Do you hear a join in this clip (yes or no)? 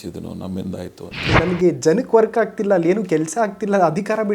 yes